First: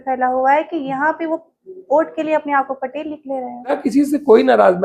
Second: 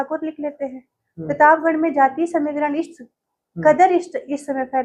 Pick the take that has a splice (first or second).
first